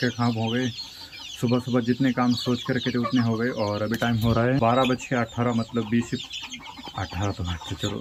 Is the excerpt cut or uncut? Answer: uncut